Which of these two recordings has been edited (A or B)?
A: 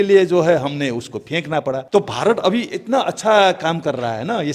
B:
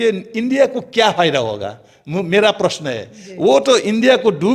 A